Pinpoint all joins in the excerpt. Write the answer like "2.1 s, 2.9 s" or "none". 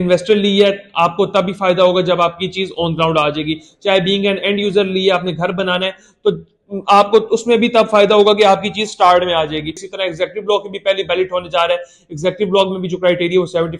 9.9 s